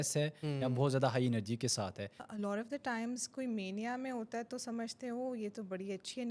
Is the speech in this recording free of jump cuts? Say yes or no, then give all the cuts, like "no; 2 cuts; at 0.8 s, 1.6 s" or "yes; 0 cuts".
no; 1 cut; at 2.2 s